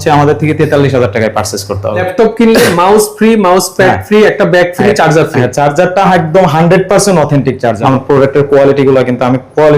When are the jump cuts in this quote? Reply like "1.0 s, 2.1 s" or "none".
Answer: 2.1 s, 7.8 s